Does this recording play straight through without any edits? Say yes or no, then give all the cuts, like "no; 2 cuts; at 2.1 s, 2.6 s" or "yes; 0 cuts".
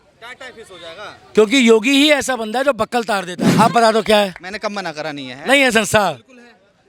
no; 1 cut; at 3.4 s